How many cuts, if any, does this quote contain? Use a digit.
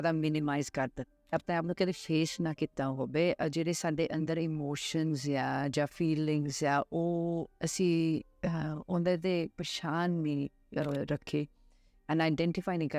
1